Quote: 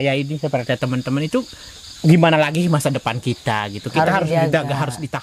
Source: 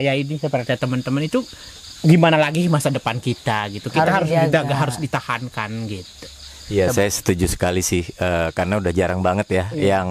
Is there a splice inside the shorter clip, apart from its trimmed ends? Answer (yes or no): no